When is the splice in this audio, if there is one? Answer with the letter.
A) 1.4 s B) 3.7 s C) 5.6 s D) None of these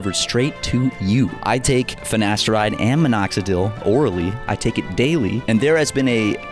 A